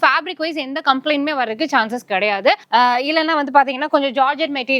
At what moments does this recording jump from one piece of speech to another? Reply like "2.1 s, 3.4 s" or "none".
2.6 s